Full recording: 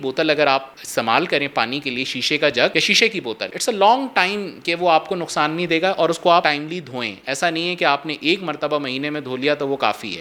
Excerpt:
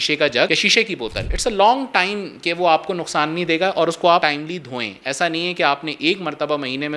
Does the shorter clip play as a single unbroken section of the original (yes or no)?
yes